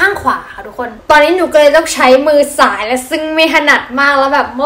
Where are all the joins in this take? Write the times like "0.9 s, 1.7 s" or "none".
1.0 s